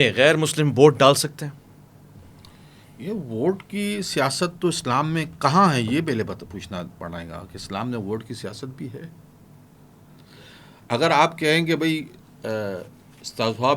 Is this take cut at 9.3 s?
no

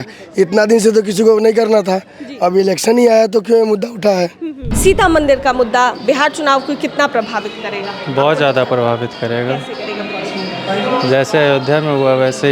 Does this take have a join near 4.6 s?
yes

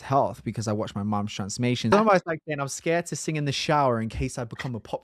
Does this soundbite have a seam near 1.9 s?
yes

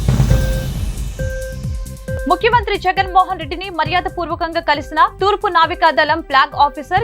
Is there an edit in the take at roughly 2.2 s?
yes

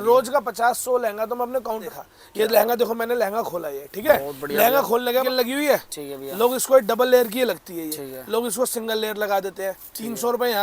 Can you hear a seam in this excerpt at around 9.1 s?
no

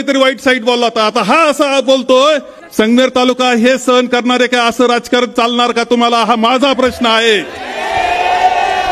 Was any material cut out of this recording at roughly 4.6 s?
no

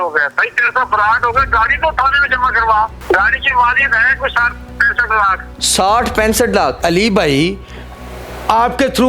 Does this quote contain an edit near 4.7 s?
no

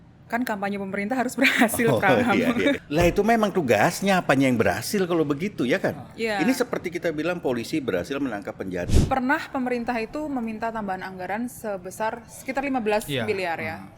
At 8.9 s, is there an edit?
yes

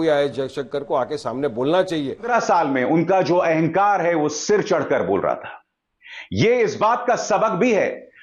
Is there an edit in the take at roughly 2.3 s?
yes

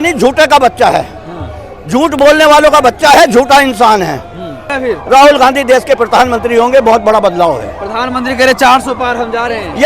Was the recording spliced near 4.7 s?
yes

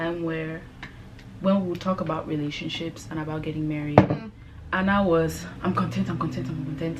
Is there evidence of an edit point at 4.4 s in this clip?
no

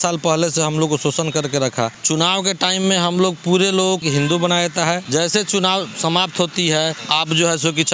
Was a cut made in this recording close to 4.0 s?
yes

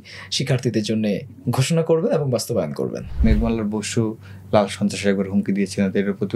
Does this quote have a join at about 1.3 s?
no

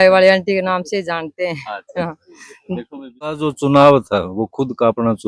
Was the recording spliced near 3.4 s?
yes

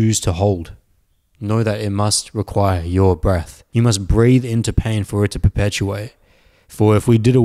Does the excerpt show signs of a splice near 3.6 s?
yes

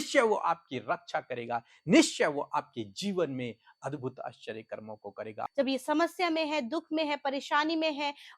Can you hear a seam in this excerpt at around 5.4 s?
yes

